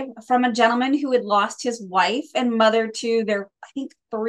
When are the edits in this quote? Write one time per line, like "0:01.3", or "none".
none